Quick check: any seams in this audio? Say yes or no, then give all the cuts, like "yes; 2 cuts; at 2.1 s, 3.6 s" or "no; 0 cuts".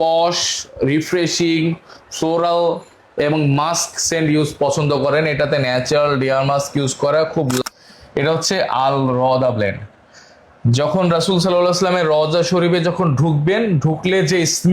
yes; 1 cut; at 7.6 s